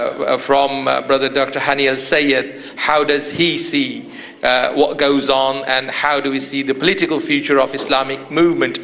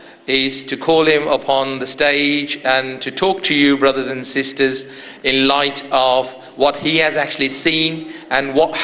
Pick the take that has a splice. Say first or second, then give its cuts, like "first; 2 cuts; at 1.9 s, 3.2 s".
second; 1 cut; at 4.5 s